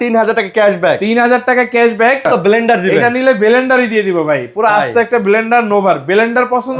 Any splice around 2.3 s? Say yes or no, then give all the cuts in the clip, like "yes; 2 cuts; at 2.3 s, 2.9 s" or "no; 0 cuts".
yes; 1 cut; at 2.3 s